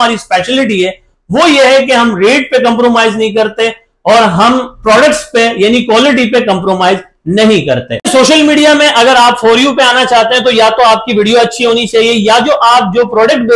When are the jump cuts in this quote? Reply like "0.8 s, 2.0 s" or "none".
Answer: 8.1 s